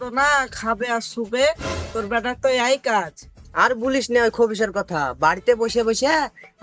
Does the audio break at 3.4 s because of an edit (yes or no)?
no